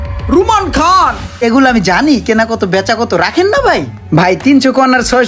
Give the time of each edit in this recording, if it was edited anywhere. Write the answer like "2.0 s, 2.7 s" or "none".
1.4 s